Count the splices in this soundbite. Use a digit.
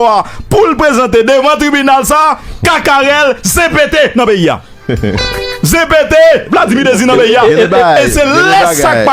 1